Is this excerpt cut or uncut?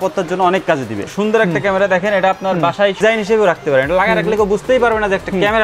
cut